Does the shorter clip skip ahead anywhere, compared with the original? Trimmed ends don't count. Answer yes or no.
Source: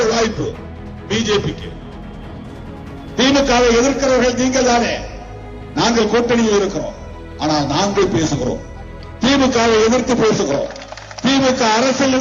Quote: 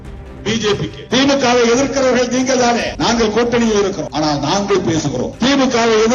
yes